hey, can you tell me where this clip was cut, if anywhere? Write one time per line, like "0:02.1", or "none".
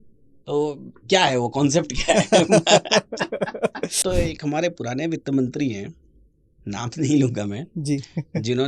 0:03.9